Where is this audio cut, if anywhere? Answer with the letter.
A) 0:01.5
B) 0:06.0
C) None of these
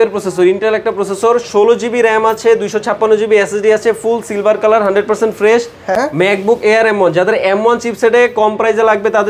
B